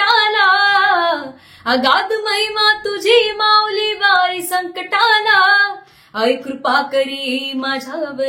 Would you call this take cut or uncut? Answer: uncut